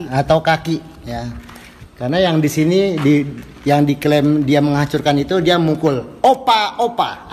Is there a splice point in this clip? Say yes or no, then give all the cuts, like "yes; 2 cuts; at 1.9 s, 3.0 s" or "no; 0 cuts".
no; 0 cuts